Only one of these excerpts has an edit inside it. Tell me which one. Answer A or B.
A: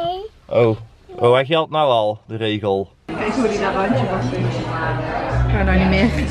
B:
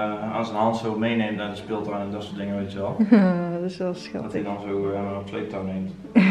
A